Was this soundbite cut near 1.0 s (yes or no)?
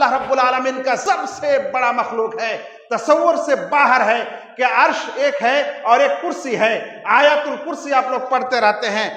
yes